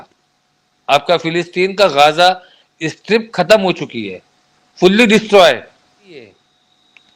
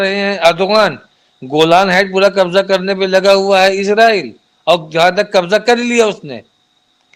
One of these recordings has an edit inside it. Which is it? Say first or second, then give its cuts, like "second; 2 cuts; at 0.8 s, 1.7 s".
first; 1 cut; at 6.2 s